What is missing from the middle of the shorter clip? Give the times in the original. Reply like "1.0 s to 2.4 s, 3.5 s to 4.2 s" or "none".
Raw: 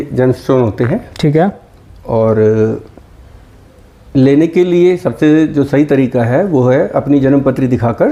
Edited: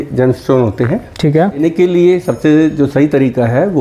1.6 s to 4.4 s

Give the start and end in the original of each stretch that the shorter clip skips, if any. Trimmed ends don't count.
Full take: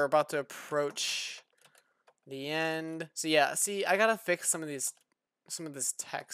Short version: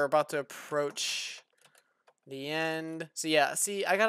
none

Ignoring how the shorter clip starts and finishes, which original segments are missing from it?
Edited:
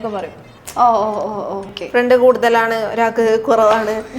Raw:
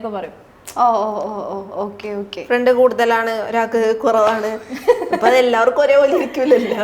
1.7 s to 2.3 s

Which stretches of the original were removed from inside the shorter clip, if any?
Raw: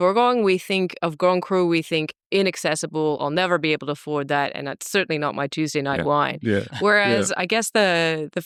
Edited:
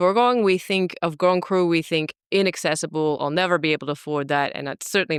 none

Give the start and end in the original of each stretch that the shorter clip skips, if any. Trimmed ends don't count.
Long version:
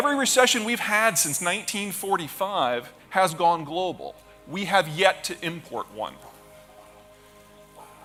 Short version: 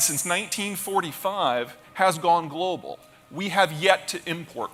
none

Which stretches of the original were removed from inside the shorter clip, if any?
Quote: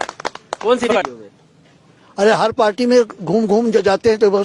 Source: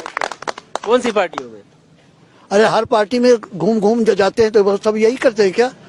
1.4 s to 1.5 s

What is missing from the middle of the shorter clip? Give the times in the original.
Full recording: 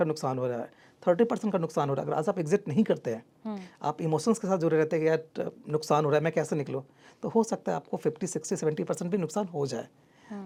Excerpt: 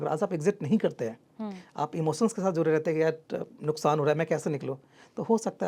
none

